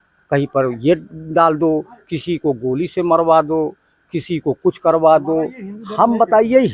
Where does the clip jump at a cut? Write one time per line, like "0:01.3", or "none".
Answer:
none